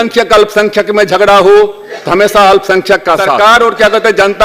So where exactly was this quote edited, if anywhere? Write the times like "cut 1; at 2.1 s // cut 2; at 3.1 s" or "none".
cut 1; at 3.5 s